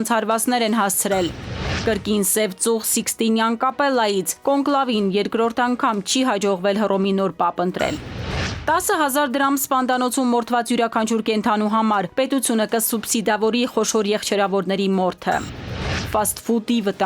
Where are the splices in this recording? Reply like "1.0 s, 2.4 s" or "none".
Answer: 8.5 s